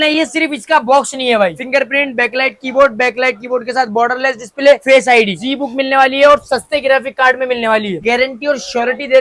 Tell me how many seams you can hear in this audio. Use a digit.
3